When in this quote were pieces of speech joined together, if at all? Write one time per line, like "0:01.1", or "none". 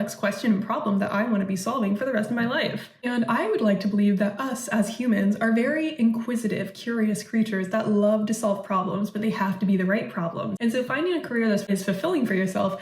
0:10.5
0:11.6

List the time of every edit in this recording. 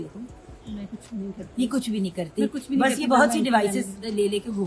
none

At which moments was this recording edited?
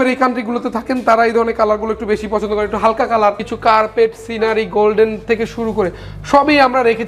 0:03.5

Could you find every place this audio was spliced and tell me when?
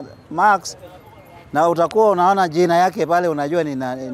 none

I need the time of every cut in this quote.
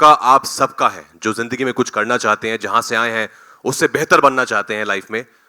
none

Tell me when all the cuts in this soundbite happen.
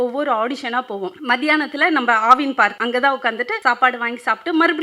0:01.2
0:02.8
0:03.5

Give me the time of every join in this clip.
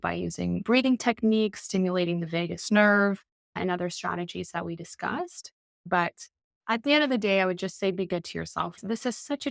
0:05.8

